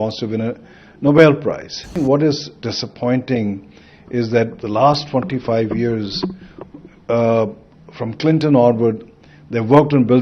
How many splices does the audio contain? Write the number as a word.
one